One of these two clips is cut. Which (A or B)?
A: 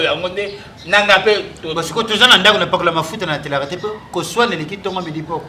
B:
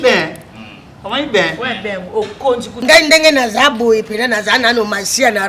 B